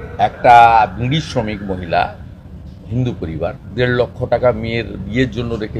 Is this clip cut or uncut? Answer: uncut